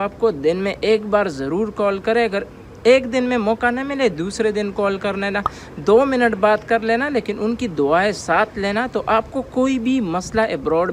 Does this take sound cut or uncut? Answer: uncut